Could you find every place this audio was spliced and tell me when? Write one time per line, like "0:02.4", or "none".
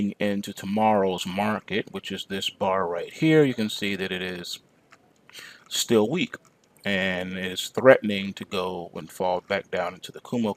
0:03.1